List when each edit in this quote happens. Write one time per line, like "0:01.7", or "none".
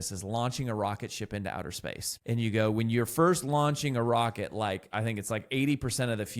0:02.1